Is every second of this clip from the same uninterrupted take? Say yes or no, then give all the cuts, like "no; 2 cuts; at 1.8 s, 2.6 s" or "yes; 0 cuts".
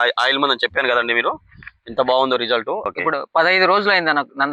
no; 1 cut; at 2.9 s